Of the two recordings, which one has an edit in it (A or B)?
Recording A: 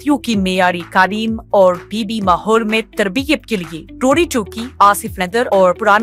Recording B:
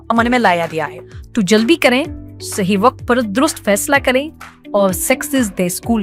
B